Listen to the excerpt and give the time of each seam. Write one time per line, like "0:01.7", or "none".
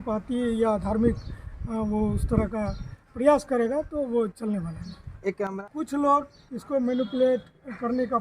0:05.5